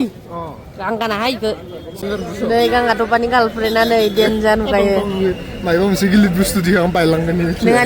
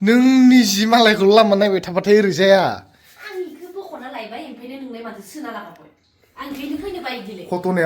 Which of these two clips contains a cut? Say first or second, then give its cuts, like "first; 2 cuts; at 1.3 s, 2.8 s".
first; 1 cut; at 1.9 s